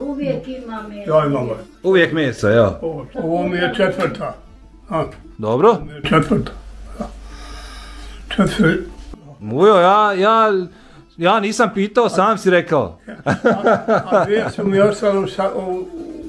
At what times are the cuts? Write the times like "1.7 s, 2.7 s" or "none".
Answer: 3.1 s